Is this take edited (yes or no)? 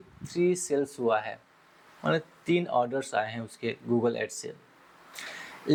no